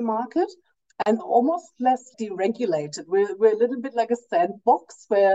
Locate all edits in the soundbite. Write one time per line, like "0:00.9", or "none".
0:01.2

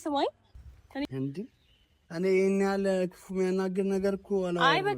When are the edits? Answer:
0:01.0

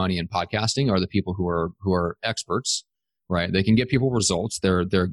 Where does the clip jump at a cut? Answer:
none

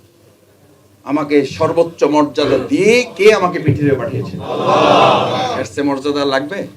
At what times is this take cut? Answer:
none

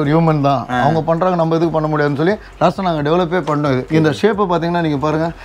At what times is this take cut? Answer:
0:02.5
0:03.9

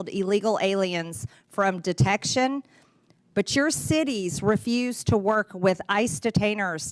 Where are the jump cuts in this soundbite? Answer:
none

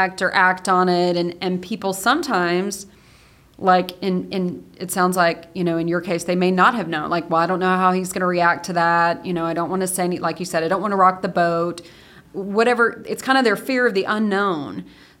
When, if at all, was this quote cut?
0:12.1

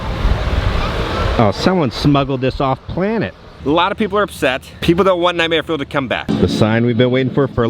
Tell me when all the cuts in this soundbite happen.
0:03.5
0:06.2

